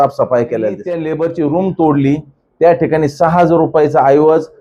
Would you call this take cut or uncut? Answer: cut